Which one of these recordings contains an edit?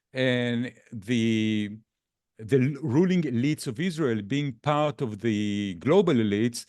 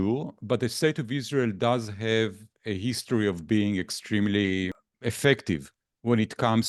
second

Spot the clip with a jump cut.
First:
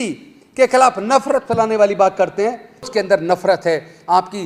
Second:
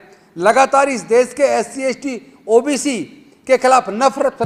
first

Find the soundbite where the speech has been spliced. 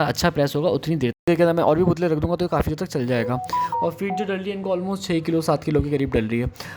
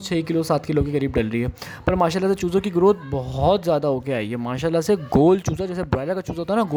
first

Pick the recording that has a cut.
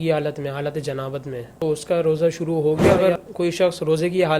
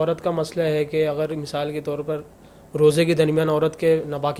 first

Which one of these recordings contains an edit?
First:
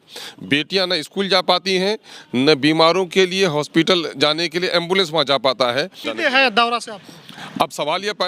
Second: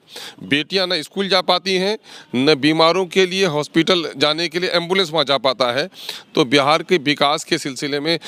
first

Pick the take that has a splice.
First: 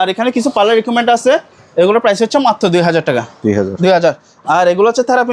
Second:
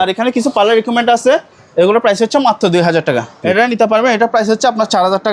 second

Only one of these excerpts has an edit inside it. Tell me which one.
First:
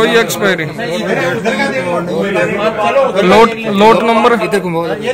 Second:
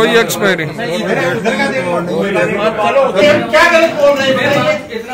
second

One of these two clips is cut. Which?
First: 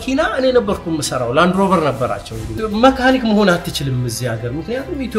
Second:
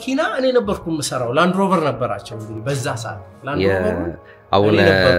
first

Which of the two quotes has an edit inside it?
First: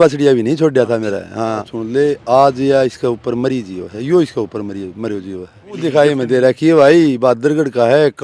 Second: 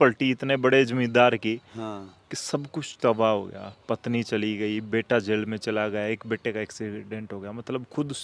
first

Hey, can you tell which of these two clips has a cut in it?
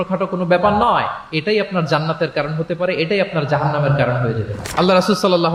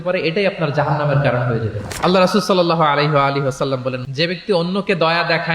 second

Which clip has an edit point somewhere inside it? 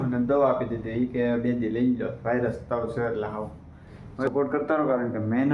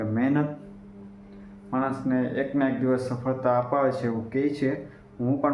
first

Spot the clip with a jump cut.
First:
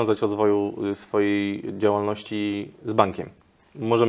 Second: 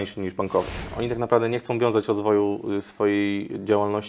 second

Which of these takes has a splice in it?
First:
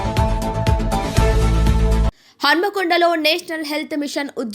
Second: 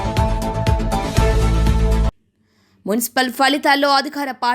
first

